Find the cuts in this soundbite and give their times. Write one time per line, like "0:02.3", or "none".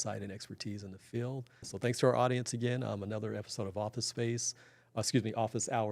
0:01.6